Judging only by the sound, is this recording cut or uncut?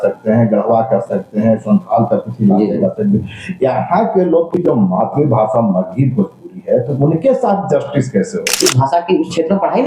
cut